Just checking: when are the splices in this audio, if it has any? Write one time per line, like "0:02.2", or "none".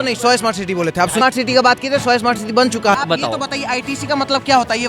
0:01.2
0:02.9

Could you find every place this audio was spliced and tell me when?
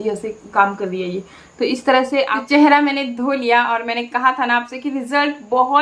0:02.4

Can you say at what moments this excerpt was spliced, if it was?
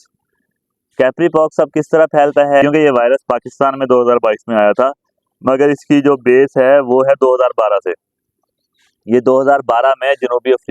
0:02.6

